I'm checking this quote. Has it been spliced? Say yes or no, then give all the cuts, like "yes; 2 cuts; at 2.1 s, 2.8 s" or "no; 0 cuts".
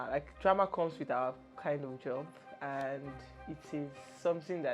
no; 0 cuts